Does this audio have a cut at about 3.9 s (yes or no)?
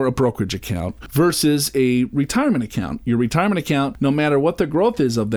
yes